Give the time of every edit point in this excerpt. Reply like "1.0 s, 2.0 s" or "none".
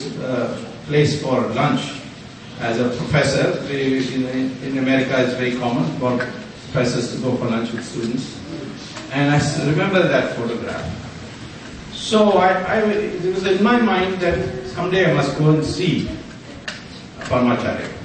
16.2 s